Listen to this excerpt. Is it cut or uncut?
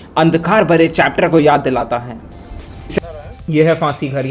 cut